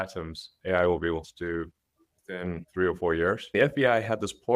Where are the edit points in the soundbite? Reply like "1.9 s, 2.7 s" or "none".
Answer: 2.6 s, 3.4 s